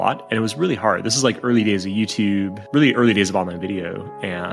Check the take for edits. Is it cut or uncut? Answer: uncut